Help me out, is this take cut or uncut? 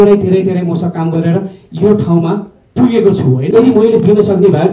cut